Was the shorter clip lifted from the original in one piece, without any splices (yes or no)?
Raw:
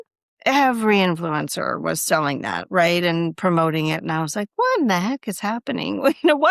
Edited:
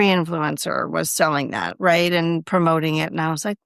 yes